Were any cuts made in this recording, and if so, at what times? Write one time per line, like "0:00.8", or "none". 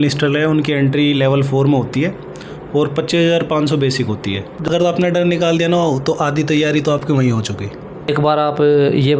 0:04.5
0:07.9